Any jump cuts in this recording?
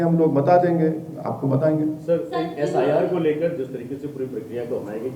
no; 0 cuts

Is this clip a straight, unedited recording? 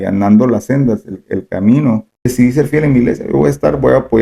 no; 1 cut; at 2.2 s

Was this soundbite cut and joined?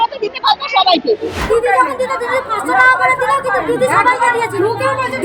yes; 1 cut; at 1.4 s

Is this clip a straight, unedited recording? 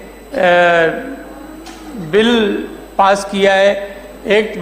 yes; 0 cuts

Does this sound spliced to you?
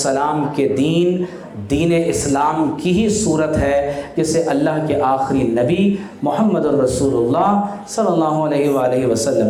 no; 0 cuts

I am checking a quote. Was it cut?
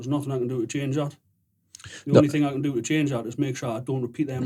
no; 0 cuts

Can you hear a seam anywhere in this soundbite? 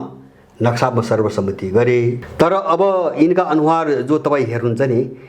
yes; 1 cut; at 2.2 s

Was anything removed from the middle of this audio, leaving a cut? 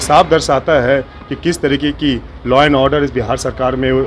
no; 0 cuts

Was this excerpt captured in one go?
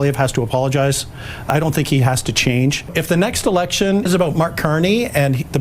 no; 2 cuts; at 2.9 s, 4.1 s

